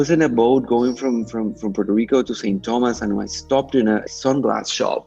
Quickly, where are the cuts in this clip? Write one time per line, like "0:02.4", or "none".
0:04.1